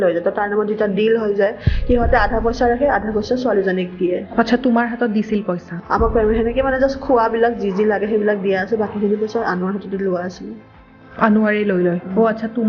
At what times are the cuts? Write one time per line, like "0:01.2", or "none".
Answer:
0:05.8